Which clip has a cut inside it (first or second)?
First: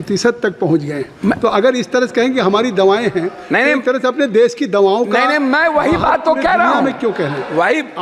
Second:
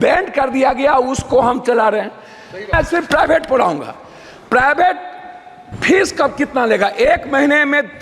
second